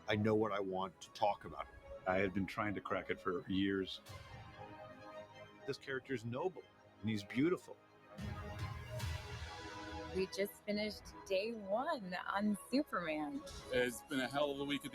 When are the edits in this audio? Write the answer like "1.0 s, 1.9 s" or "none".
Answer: 13.0 s